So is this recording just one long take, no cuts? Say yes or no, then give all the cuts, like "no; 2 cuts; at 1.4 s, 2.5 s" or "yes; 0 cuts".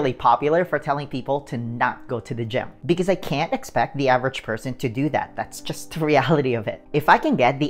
no; 2 cuts; at 2.7 s, 6.8 s